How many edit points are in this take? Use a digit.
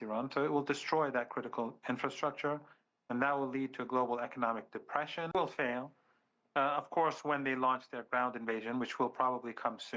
1